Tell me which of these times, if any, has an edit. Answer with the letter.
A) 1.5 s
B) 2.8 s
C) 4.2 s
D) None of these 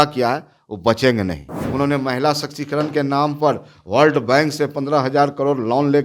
A